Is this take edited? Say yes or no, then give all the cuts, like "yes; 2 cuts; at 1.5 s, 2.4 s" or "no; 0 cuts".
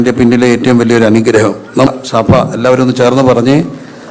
yes; 1 cut; at 1.9 s